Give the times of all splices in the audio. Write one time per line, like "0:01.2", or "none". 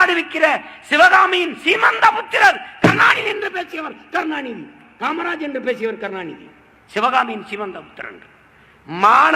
none